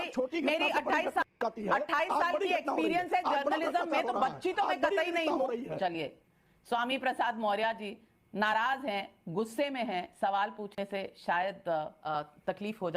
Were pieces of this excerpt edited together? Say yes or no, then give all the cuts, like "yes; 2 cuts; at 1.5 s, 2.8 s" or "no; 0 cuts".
yes; 2 cuts; at 5.7 s, 12.0 s